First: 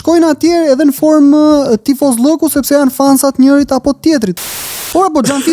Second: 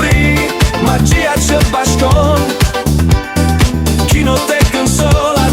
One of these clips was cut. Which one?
first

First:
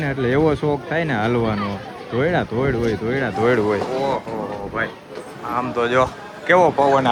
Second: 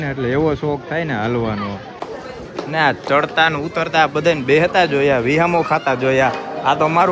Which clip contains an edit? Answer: second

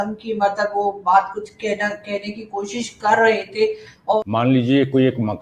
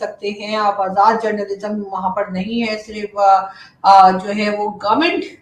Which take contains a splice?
first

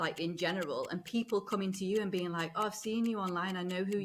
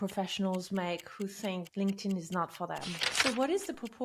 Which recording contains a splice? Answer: second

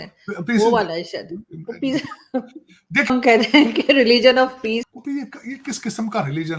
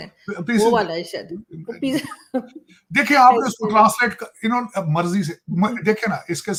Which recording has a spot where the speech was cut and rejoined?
first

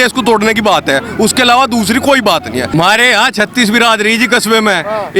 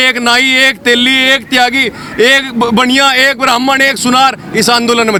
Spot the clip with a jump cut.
first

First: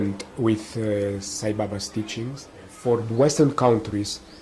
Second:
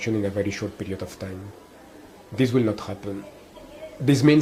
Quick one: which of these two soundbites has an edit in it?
first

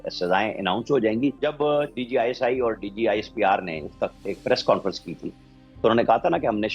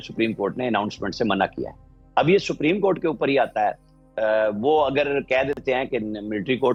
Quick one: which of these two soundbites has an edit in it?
first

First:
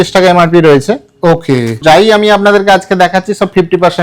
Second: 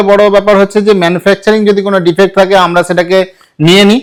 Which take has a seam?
first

